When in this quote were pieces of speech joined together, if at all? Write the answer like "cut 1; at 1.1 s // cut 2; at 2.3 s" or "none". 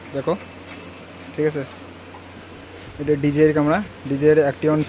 none